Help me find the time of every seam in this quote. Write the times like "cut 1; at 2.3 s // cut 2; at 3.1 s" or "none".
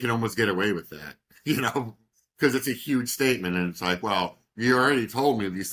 none